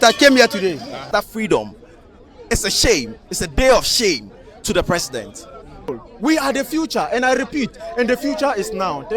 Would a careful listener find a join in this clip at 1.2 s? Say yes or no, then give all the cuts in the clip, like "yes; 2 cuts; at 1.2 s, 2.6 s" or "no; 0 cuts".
yes; 2 cuts; at 1.2 s, 5.8 s